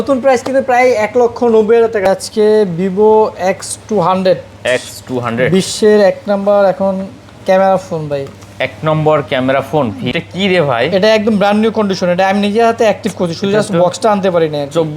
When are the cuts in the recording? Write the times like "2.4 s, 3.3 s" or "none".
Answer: 2.1 s, 10.1 s